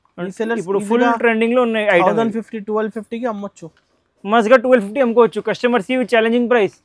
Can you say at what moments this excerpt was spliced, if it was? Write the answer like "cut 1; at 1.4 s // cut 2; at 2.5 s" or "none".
none

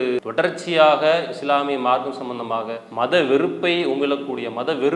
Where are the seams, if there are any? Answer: cut 1; at 2.8 s

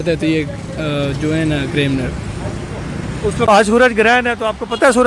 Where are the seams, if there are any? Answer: cut 1; at 3.5 s

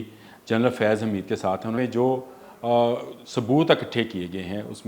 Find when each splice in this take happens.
cut 1; at 1.8 s

